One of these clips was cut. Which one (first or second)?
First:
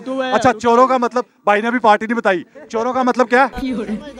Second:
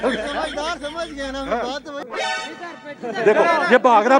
second